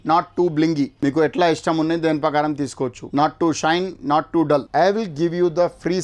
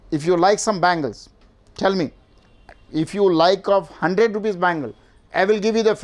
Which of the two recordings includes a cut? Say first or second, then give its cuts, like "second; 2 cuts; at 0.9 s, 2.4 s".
first; 3 cuts; at 0.9 s, 3.0 s, 4.7 s